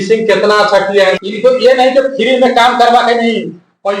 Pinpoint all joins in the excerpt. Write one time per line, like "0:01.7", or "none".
0:01.2